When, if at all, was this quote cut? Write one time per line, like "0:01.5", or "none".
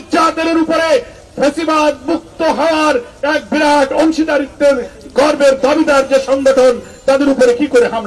none